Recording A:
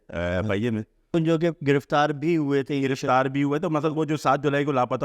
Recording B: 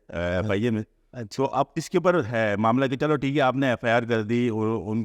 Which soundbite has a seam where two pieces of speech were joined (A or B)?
A